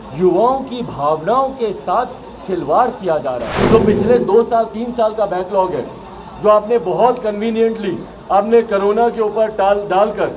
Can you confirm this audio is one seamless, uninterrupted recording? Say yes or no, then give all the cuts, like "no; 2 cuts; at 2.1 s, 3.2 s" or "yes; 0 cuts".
no; 1 cut; at 3.5 s